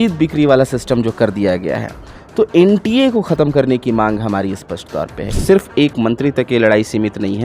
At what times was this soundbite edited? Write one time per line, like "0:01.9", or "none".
0:05.2